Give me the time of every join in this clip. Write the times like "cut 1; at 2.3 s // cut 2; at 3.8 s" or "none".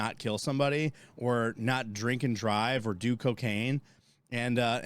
none